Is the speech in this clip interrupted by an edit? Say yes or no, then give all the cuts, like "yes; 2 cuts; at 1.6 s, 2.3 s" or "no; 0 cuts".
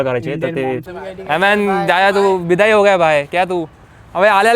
yes; 1 cut; at 0.9 s